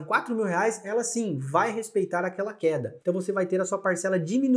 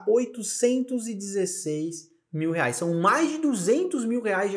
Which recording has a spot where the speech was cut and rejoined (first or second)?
first